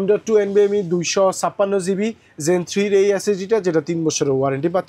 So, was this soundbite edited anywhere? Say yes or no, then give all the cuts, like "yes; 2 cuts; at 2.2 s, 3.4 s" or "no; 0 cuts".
no; 0 cuts